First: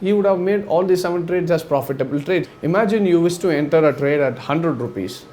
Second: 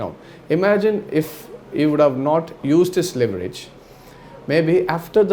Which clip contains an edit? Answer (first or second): first